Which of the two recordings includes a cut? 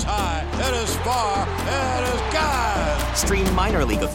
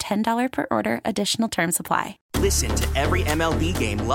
second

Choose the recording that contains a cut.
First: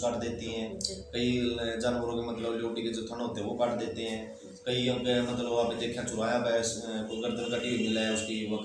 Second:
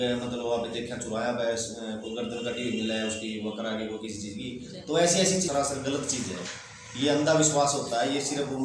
second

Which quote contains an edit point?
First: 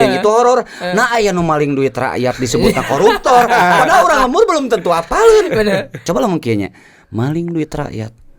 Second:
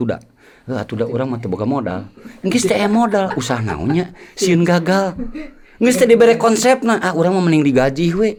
first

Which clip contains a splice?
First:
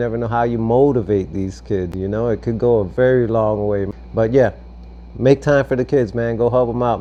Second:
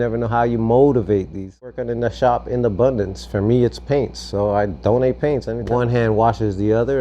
second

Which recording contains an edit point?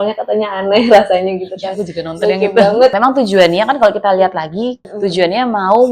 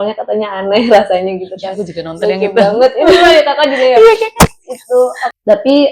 first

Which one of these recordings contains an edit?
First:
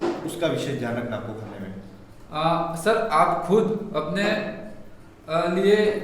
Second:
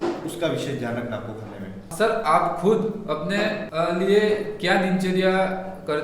second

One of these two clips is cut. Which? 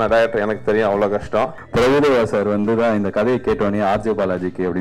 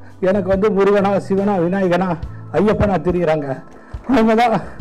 first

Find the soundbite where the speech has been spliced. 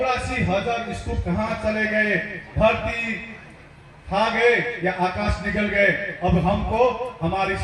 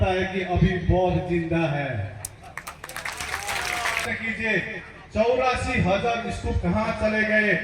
second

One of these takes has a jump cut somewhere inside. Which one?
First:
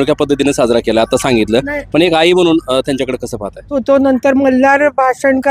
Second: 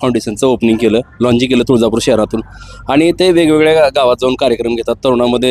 first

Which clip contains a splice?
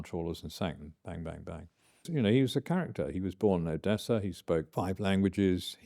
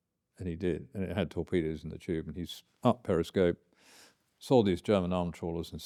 first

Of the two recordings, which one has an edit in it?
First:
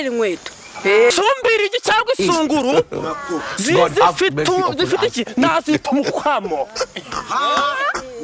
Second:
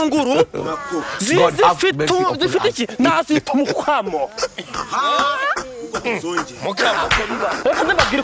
first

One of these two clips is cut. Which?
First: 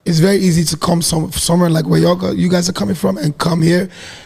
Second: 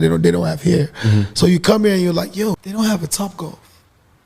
second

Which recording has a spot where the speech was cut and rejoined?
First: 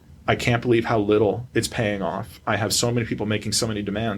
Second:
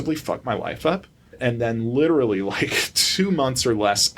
second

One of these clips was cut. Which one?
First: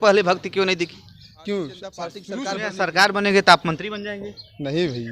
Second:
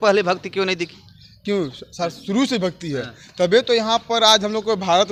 first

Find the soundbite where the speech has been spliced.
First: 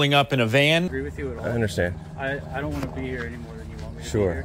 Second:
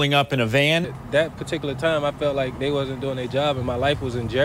first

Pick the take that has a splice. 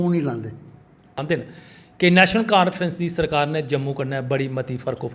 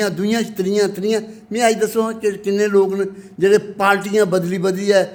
first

